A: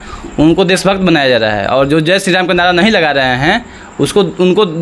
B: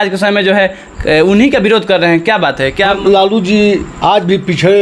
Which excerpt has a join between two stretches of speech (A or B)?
B